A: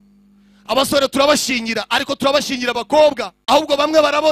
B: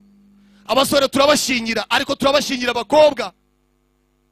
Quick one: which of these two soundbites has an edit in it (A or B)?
A